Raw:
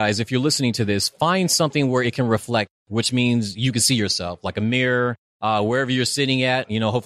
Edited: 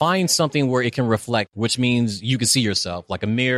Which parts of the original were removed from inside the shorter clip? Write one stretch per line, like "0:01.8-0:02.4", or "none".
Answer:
0:02.7-0:02.8